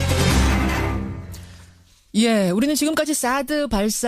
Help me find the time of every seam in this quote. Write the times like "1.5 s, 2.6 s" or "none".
none

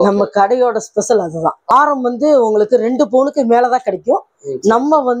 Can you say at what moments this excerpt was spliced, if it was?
1.7 s

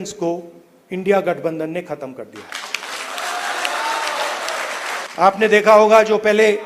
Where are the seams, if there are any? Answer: 5.1 s

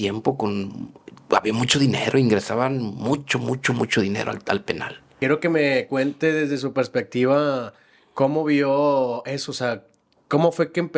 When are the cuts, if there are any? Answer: 5.1 s

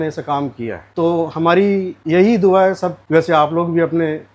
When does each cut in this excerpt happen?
3.0 s

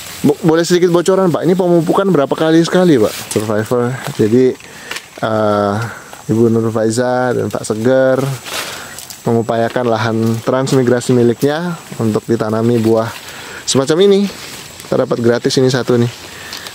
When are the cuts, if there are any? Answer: 3.2 s

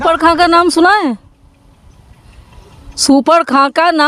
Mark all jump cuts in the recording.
none

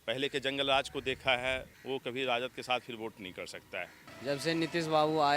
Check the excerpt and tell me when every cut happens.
1.7 s, 4.0 s

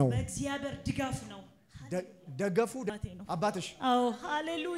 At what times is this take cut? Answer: 2.9 s

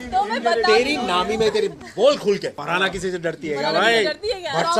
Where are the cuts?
2.6 s

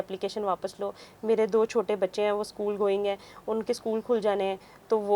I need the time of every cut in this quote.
none

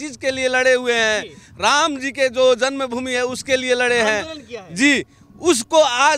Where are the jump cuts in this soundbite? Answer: none

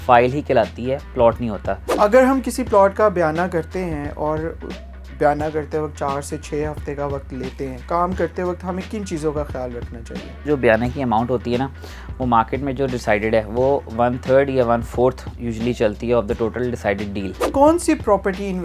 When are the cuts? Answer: 1.8 s, 7.8 s, 10.4 s, 17.5 s

